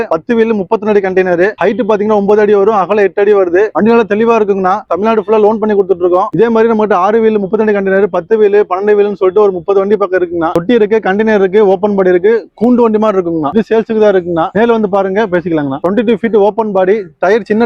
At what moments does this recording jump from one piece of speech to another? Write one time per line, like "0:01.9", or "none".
0:03.7
0:04.9
0:06.3
0:10.5
0:13.5
0:15.8